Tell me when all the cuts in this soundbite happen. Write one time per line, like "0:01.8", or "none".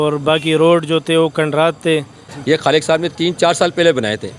0:02.2